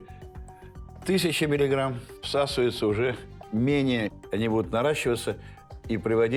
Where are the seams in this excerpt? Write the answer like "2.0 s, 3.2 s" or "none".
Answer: none

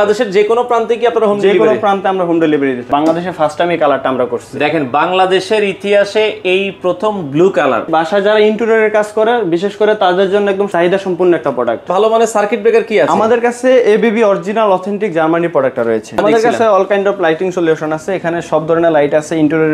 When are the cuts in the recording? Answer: 2.9 s, 7.9 s, 10.7 s, 11.9 s, 16.2 s

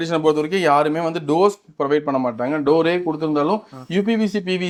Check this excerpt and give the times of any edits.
none

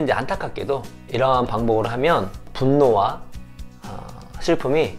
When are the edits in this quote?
1.0 s, 2.4 s

